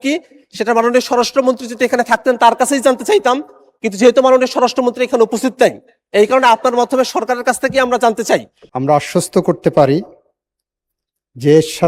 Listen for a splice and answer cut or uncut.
cut